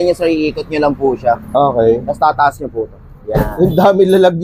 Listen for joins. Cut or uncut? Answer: uncut